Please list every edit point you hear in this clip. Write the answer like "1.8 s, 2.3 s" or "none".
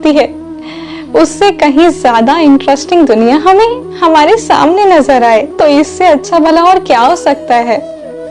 5.5 s